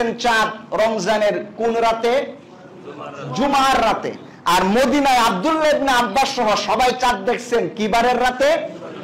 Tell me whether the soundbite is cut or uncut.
uncut